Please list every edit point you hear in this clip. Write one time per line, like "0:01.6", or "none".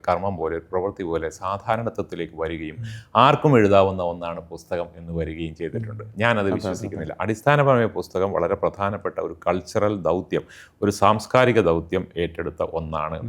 none